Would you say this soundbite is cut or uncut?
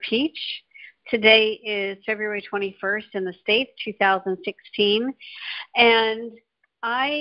cut